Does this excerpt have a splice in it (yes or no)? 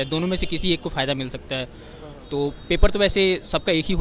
no